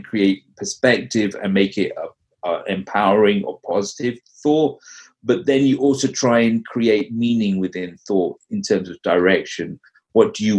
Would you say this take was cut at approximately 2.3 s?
no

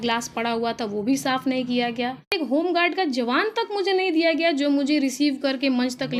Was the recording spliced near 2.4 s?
yes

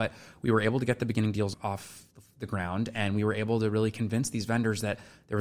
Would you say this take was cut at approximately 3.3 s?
no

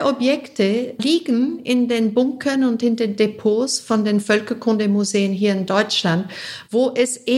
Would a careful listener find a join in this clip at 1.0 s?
yes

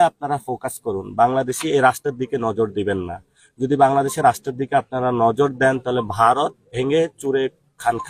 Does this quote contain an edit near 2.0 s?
no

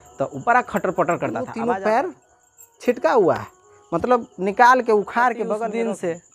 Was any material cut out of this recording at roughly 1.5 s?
yes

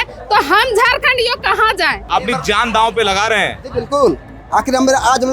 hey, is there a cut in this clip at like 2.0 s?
yes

